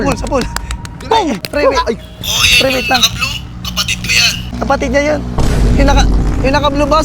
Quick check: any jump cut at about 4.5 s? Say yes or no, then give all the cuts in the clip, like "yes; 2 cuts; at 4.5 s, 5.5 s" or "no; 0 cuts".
yes; 2 cuts; at 1.4 s, 4.5 s